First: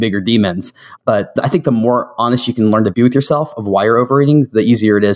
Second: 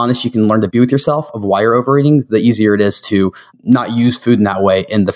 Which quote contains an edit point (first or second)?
first